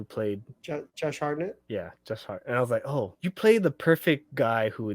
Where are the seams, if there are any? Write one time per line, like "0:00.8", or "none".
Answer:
0:00.9
0:01.6
0:03.1